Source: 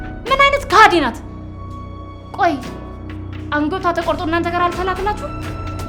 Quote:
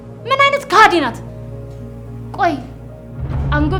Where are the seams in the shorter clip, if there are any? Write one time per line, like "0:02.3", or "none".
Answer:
none